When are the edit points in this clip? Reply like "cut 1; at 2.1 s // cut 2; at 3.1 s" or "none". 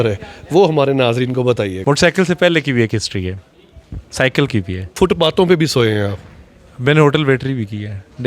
cut 1; at 1.8 s // cut 2; at 4.9 s